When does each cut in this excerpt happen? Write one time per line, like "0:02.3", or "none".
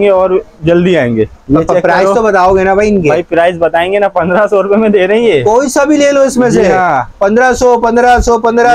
0:01.4